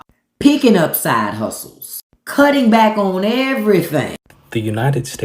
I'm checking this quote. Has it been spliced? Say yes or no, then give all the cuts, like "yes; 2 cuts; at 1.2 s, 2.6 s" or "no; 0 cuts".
yes; 1 cut; at 4.2 s